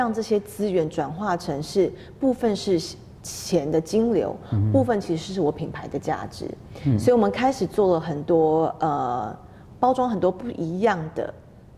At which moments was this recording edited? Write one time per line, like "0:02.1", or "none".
none